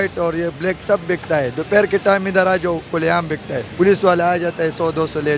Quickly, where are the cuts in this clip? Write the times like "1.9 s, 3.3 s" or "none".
3.6 s